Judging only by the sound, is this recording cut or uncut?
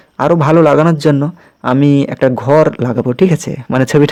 uncut